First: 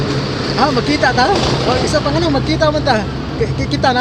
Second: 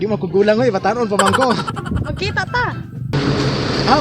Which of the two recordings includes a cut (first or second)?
second